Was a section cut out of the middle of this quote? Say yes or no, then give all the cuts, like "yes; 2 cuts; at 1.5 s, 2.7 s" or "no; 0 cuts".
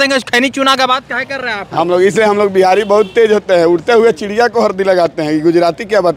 no; 0 cuts